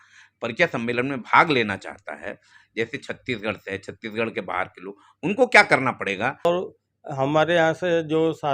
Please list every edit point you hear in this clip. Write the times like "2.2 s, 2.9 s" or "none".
6.5 s